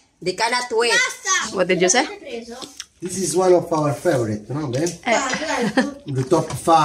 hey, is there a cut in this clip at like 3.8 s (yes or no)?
no